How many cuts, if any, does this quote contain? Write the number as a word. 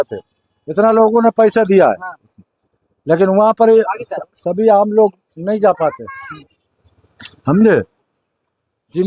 zero